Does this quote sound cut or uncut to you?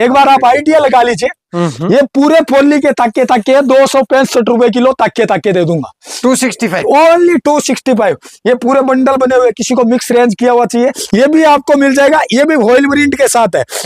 cut